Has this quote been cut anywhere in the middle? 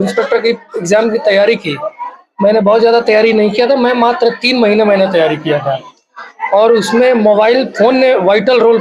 no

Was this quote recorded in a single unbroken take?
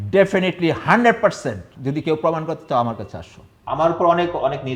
no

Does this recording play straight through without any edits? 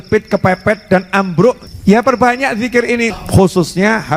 no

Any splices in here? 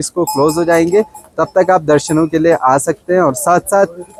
no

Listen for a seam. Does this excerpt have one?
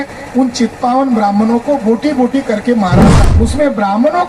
yes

